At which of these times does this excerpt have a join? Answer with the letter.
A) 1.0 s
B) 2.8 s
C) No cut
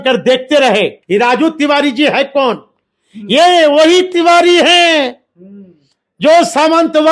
A